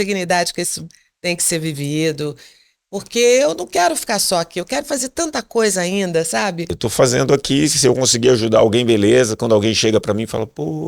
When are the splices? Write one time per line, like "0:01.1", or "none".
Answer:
0:06.8